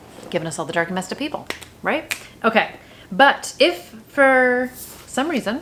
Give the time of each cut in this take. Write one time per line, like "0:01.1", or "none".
none